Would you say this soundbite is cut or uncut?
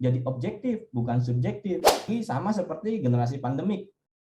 cut